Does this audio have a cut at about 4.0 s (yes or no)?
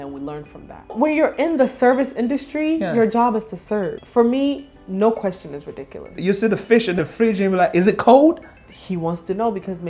yes